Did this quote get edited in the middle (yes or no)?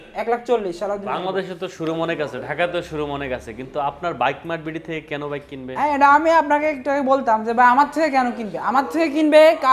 yes